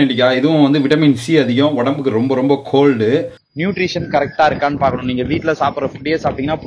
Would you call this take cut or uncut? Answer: cut